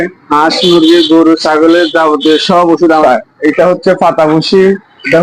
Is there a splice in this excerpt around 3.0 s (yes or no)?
yes